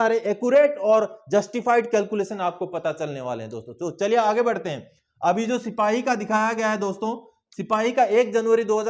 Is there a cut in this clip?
no; 0 cuts

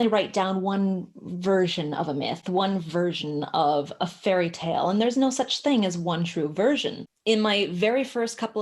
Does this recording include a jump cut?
yes; 1 cut; at 6.9 s

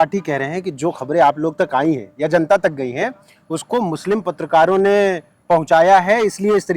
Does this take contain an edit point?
no; 0 cuts

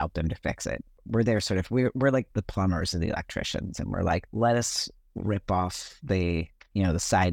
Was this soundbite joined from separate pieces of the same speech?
yes; 3 cuts; at 0.9 s, 2.3 s, 4.3 s

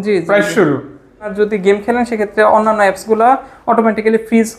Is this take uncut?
no; 1 cut; at 1.2 s

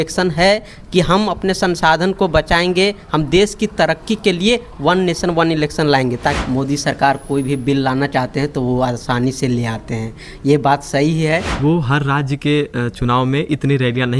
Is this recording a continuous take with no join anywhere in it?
no; 2 cuts; at 6.4 s, 11.5 s

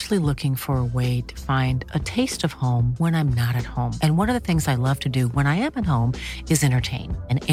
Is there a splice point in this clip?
no; 0 cuts

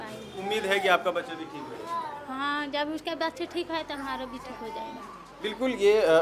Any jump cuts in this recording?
no; 0 cuts

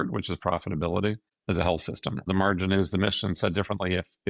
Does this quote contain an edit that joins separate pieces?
yes; 1 cut; at 2.3 s

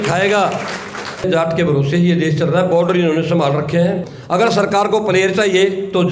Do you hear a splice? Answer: yes; 2 cuts; at 1.2 s, 4.1 s

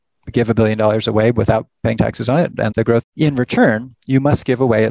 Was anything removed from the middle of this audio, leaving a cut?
yes; 1 cut; at 3.0 s

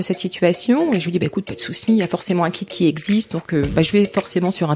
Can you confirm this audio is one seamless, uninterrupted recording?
yes; 0 cuts

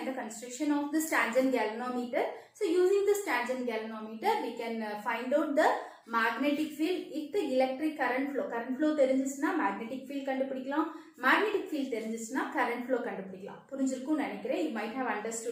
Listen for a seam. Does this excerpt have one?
no; 0 cuts

